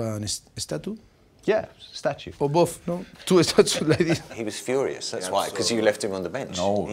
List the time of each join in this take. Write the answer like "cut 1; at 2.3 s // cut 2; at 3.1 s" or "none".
cut 1; at 2.3 s // cut 2; at 4.3 s